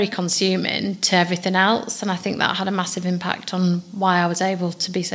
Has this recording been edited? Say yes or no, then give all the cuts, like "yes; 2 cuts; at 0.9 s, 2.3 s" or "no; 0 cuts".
no; 0 cuts